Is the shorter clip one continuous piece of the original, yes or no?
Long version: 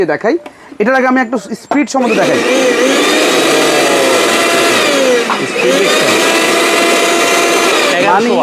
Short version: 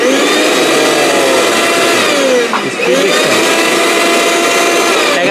yes